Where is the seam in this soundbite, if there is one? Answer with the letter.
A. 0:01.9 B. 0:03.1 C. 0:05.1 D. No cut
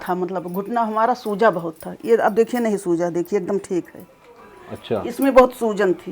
D